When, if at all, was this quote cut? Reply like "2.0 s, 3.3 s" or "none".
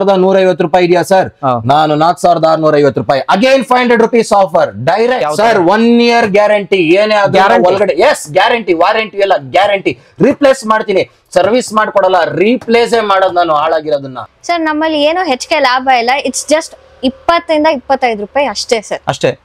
5.2 s, 14.2 s